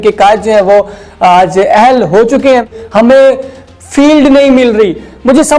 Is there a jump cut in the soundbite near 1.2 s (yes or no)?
no